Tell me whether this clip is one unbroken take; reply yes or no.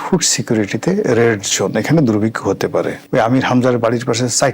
no